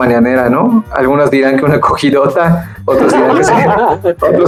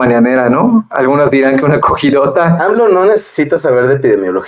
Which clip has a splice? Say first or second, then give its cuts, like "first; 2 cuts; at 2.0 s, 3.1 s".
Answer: second; 1 cut; at 2.6 s